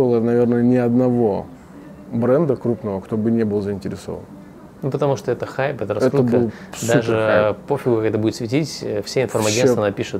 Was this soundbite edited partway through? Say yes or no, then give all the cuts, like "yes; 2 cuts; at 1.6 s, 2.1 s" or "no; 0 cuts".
no; 0 cuts